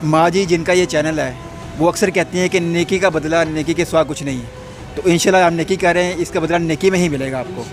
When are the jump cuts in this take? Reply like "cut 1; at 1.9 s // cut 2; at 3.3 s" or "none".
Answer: none